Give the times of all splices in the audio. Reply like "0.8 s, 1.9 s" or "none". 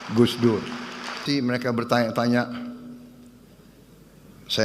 1.2 s